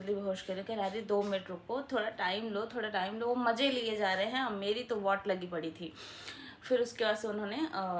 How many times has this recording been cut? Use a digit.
0